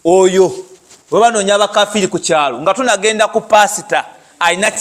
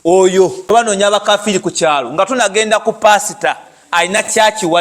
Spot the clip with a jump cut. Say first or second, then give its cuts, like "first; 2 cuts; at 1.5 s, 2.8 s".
second; 1 cut; at 0.9 s